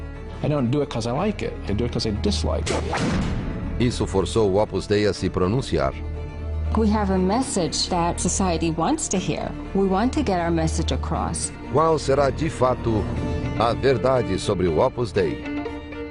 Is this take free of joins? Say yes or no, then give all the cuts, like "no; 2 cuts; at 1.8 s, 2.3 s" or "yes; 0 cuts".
no; 1 cut; at 7.0 s